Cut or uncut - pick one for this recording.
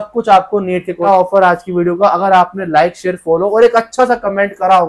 cut